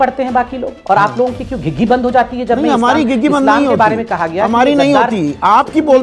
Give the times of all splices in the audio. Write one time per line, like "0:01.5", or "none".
none